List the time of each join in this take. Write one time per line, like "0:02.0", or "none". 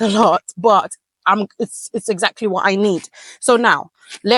none